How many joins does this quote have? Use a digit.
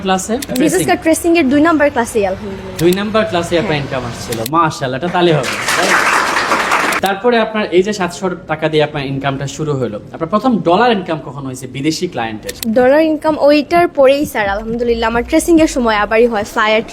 0